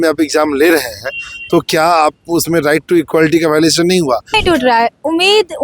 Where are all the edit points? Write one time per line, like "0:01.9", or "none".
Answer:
0:04.4